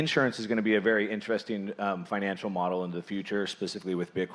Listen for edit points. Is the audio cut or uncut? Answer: uncut